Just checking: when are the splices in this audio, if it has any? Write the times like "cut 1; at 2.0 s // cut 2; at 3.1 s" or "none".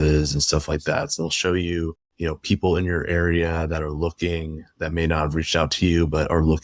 cut 1; at 1.1 s